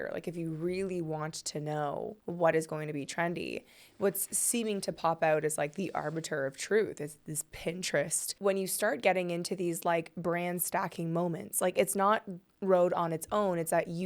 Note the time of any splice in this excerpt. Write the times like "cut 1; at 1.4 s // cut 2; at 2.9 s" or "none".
cut 1; at 2.2 s // cut 2; at 8.3 s